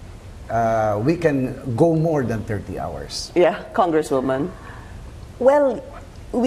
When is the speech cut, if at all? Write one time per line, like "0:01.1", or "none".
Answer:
none